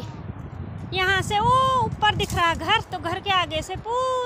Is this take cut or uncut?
uncut